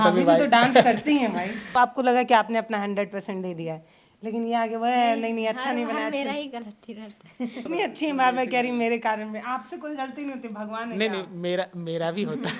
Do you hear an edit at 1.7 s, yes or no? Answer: yes